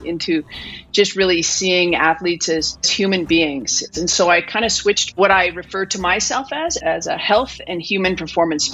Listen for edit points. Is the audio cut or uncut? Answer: cut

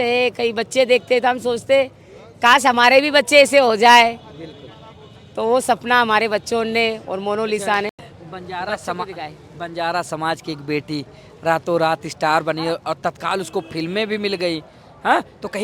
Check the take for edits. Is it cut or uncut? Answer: uncut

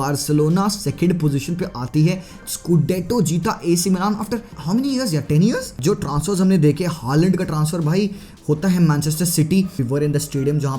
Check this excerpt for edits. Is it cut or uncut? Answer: cut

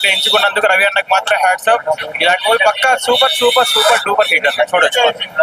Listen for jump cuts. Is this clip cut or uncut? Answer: uncut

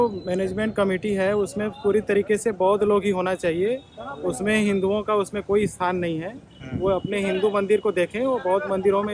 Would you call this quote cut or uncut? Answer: uncut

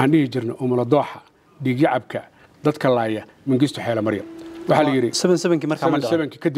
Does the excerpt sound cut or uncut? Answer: uncut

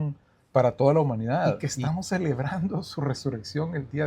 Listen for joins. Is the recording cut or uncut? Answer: cut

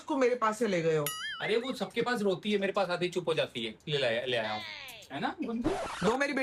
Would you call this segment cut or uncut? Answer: cut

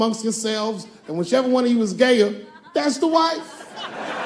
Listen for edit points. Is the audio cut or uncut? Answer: uncut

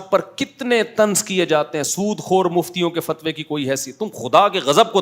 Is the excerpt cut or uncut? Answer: uncut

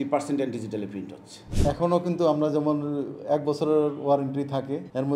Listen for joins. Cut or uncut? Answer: cut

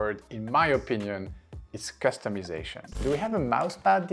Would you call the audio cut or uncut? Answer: cut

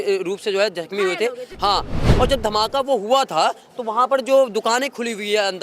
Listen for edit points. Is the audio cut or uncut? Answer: cut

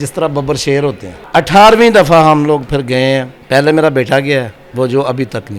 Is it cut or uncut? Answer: cut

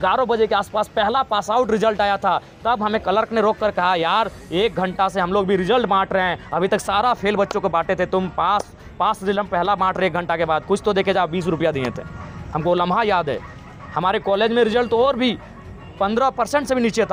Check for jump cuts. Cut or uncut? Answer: uncut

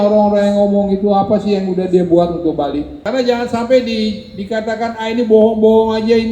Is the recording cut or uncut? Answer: cut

